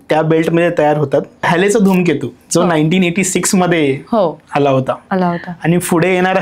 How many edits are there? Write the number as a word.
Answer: one